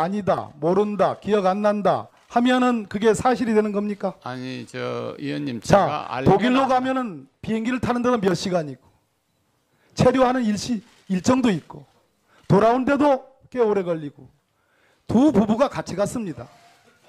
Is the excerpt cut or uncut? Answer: uncut